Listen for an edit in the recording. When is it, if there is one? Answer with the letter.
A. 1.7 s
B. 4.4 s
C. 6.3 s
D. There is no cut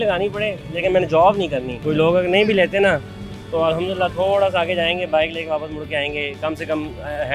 A